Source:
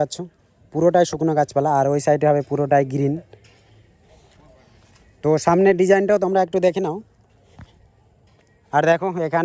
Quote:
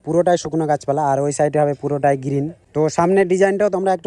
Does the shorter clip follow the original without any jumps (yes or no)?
no